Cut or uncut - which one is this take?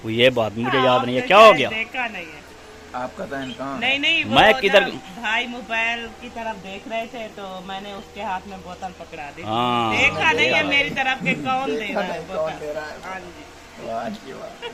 uncut